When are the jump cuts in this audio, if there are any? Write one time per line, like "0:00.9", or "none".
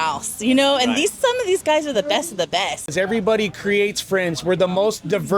0:02.9